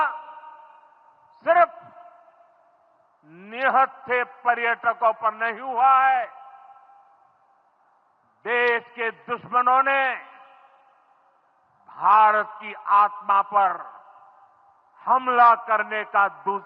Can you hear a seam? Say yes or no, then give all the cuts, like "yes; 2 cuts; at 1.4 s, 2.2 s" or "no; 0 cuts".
no; 0 cuts